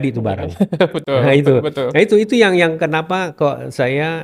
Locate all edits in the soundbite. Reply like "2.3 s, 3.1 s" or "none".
none